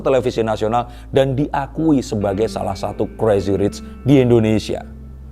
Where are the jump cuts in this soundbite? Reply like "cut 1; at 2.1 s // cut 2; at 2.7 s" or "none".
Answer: none